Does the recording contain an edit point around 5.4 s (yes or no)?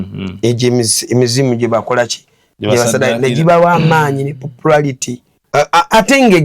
yes